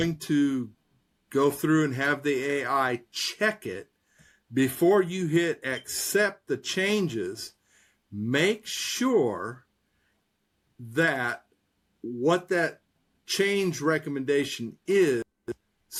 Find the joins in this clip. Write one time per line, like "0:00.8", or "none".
none